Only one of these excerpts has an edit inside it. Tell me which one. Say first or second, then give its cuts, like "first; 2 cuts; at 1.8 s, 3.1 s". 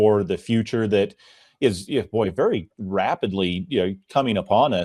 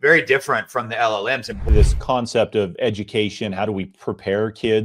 second; 1 cut; at 1.6 s